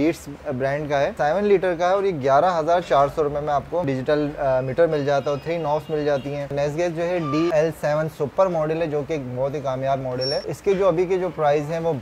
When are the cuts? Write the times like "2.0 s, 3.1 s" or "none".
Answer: 1.1 s, 3.8 s, 6.5 s, 7.5 s, 10.4 s